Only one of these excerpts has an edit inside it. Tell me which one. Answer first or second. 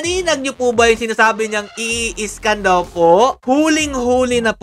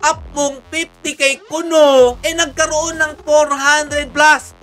first